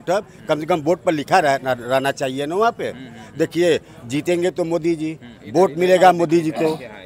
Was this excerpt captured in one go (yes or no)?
yes